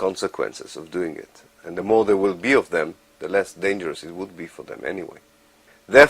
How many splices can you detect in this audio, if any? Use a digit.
1